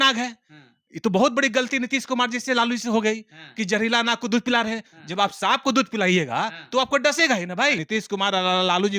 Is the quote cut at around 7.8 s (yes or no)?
yes